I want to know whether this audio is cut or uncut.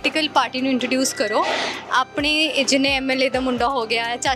uncut